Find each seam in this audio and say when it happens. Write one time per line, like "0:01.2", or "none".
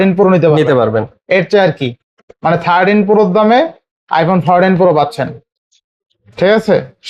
none